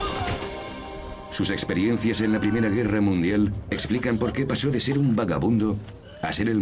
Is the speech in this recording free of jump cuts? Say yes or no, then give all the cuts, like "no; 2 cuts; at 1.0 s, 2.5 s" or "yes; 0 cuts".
no; 1 cut; at 5.5 s